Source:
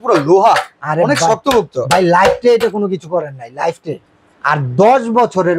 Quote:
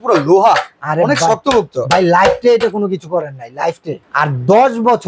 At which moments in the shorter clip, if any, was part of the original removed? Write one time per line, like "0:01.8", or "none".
0:03.9